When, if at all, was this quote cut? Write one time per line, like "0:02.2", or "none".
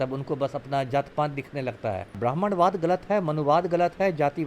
0:02.2